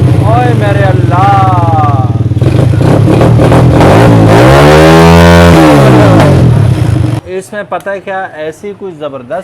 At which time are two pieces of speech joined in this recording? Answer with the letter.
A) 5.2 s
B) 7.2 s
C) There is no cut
B